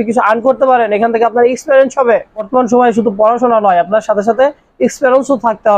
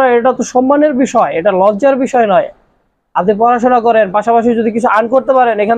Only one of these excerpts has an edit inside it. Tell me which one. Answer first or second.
first